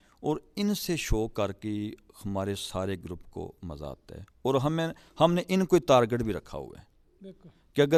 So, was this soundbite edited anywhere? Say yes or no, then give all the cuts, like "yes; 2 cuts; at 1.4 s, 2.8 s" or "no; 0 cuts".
no; 0 cuts